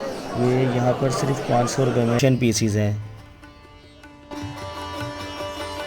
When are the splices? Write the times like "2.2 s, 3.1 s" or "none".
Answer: 2.2 s